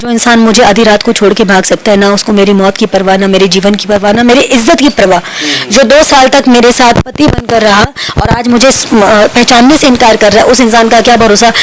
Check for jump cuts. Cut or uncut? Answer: uncut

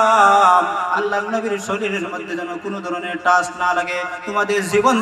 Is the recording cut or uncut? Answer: cut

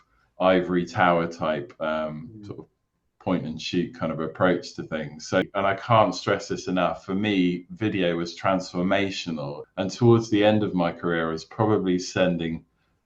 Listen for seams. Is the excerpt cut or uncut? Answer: cut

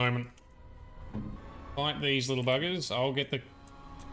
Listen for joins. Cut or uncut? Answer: cut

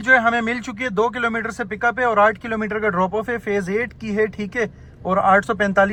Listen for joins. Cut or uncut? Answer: uncut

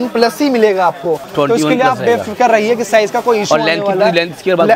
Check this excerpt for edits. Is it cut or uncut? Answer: uncut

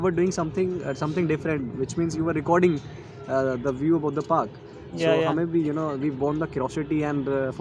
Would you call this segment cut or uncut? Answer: uncut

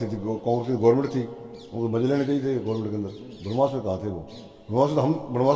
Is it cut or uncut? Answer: uncut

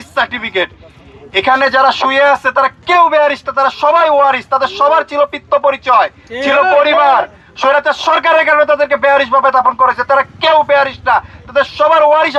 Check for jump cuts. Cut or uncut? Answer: uncut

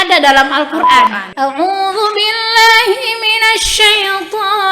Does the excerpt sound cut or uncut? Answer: cut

